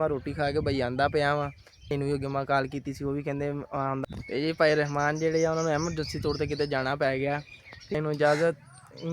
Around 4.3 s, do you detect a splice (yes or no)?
yes